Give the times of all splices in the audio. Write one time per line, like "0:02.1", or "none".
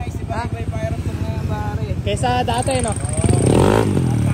none